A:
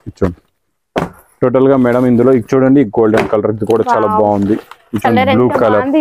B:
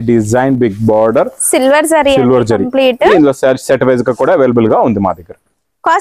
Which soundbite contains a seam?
B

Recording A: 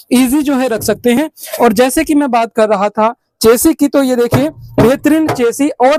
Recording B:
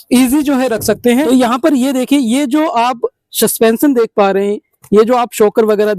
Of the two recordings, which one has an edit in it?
B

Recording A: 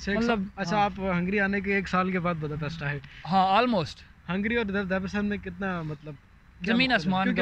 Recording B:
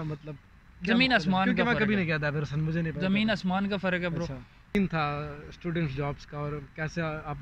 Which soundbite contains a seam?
B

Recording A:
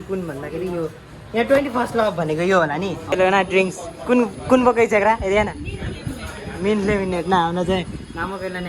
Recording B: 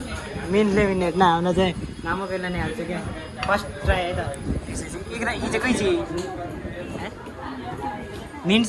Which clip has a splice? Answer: A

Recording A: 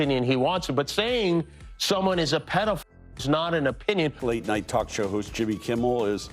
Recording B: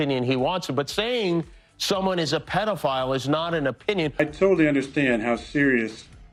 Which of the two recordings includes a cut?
A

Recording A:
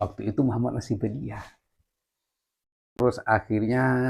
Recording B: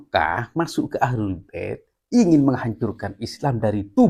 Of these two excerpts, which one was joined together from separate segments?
A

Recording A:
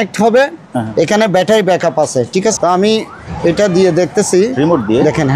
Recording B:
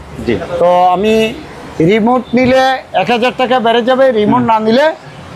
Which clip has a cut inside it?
A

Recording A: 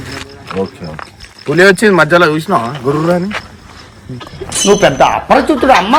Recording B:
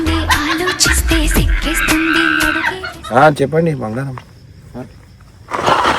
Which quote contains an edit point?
B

